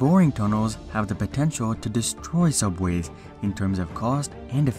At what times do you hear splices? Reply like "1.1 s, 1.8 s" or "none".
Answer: none